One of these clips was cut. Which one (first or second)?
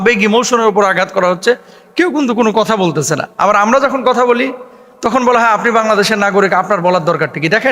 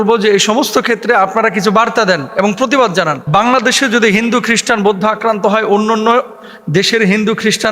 second